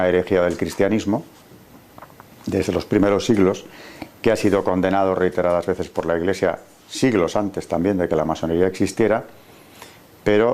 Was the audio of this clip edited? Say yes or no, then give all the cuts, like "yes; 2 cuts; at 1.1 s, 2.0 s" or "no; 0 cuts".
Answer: yes; 1 cut; at 8.7 s